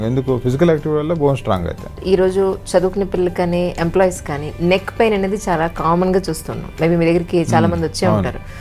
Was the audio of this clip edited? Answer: yes; 1 cut; at 2.0 s

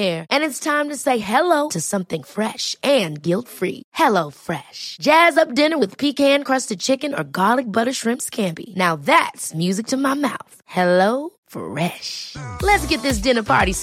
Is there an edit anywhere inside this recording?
no; 0 cuts

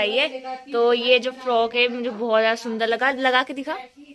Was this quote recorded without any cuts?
yes; 0 cuts

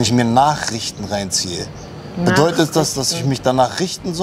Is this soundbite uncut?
yes; 0 cuts

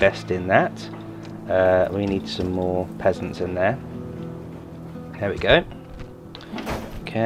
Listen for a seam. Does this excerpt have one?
no; 0 cuts

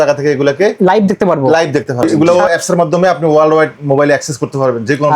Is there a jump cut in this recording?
yes; 1 cut; at 2.0 s

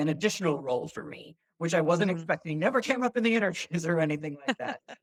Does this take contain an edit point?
no; 0 cuts

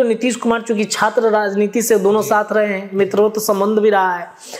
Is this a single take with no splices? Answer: yes; 0 cuts

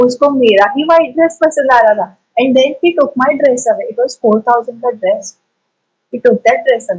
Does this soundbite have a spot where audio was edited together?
no; 0 cuts

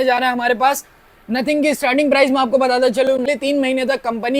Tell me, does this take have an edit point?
yes; 1 cut; at 3.3 s

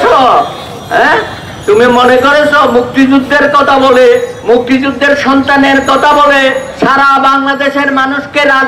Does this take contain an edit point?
no; 0 cuts

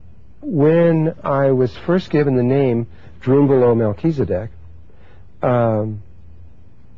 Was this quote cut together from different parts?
yes; 1 cut; at 5.7 s

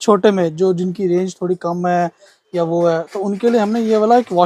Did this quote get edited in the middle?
no; 0 cuts

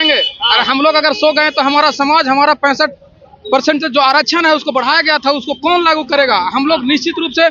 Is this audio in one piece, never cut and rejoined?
yes; 0 cuts

